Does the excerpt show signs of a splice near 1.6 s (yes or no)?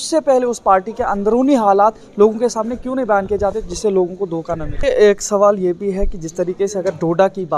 no